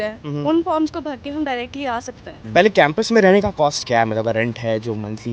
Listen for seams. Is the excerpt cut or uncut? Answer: cut